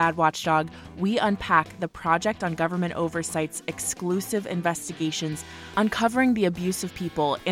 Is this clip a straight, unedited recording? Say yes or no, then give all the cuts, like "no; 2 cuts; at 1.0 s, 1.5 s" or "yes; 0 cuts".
yes; 0 cuts